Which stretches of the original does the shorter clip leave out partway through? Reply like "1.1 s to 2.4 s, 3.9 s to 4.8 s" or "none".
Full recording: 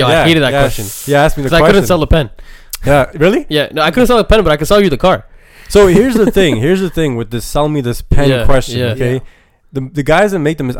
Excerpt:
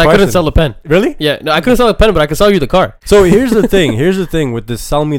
2.4 s to 3.1 s, 5.3 s to 5.6 s